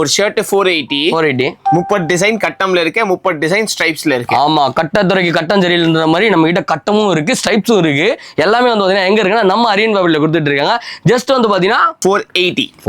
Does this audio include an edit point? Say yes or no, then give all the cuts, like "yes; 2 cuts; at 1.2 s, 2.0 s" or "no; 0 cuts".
no; 0 cuts